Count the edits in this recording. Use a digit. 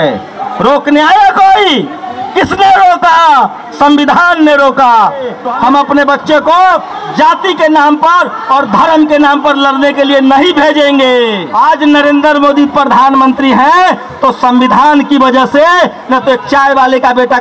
2